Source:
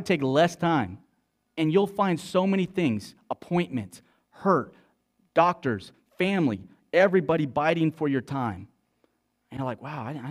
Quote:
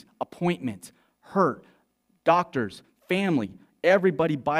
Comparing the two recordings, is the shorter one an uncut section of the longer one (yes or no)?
yes